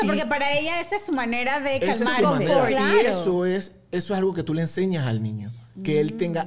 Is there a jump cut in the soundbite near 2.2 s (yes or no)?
no